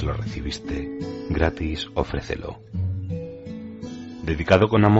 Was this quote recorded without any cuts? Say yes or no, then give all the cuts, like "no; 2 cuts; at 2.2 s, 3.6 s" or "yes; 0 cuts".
no; 2 cuts; at 2.6 s, 4.2 s